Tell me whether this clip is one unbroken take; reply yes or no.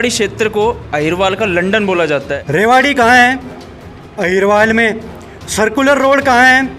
no